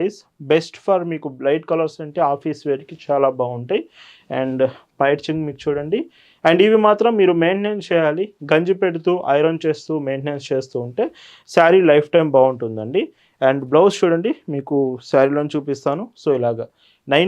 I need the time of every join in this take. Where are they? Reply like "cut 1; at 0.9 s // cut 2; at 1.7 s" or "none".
none